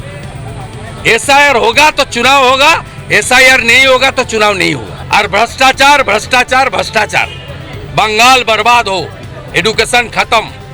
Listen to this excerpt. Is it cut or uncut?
cut